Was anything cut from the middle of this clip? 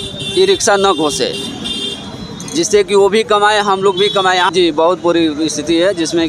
yes; 1 cut; at 4.5 s

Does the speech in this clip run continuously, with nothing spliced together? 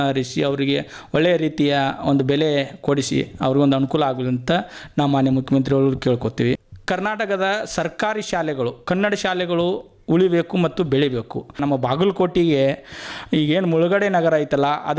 no; 2 cuts; at 6.6 s, 11.6 s

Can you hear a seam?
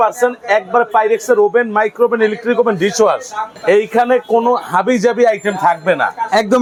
no; 0 cuts

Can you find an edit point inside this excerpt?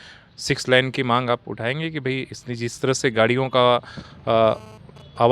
no; 0 cuts

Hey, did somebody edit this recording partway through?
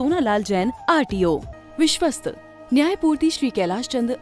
yes; 1 cut; at 1.5 s

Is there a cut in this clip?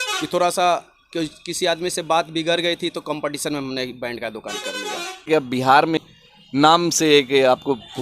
yes; 2 cuts; at 5.3 s, 6.0 s

